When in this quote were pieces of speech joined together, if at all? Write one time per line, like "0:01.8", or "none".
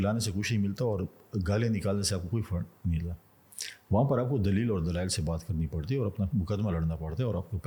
none